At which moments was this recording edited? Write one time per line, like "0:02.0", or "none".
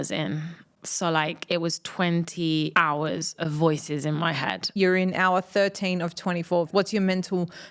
0:02.7
0:04.6
0:06.7